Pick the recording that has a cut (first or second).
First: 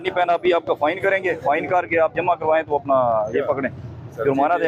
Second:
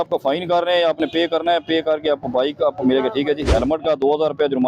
second